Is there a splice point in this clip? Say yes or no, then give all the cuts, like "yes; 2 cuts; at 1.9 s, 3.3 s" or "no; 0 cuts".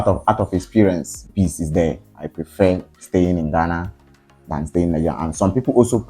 yes; 2 cuts; at 1.3 s, 2.2 s